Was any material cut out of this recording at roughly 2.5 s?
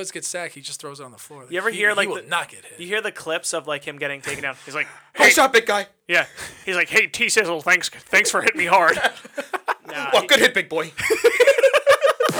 no; 0 cuts

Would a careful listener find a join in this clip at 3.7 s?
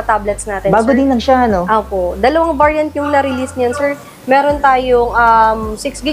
no; 0 cuts

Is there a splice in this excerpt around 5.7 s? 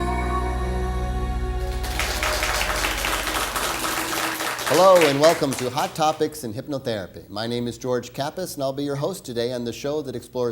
no; 1 cut; at 1.5 s

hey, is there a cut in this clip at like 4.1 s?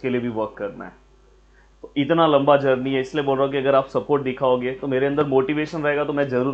no; 0 cuts

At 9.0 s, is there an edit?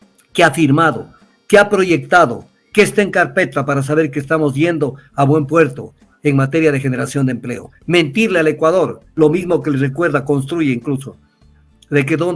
yes; 1 cut; at 9.0 s

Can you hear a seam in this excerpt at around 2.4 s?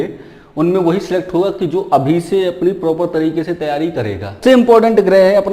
no; 1 cut; at 4.4 s

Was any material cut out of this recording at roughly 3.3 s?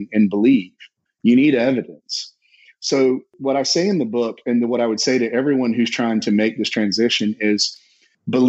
yes; 1 cut; at 3.3 s

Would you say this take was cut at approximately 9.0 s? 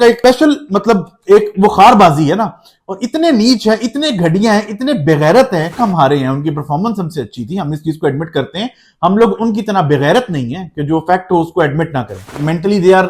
no; 2 cuts; at 5.7 s, 12.2 s

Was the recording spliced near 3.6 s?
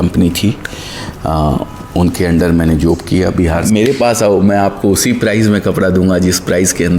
yes; 1 cut; at 3.6 s

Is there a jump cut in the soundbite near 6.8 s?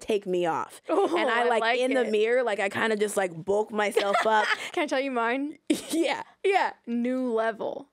yes; 2 cuts; at 4.6 s, 6.8 s

